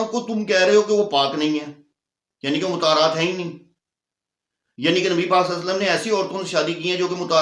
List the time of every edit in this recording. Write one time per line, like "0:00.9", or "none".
none